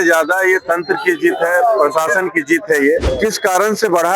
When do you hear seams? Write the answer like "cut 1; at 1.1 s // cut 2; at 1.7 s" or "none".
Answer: cut 1; at 3.1 s